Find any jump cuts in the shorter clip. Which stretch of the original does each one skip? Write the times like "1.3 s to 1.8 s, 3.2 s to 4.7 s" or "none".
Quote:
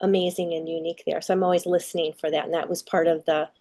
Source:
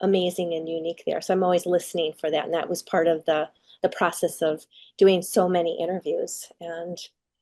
none